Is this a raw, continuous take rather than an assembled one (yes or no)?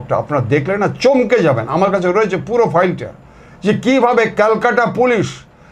yes